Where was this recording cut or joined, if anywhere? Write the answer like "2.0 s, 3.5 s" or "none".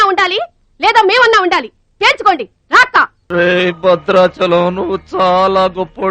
3.2 s